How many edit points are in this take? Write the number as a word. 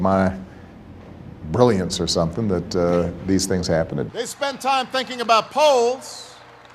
one